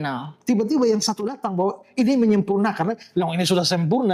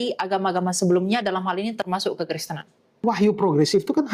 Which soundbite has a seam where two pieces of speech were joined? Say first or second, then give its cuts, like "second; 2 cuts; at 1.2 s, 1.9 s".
second; 1 cut; at 3.0 s